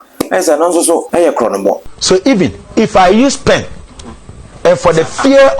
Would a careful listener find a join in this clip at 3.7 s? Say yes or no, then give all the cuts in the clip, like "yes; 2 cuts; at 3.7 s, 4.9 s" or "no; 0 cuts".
no; 2 cuts; at 1.1 s, 1.9 s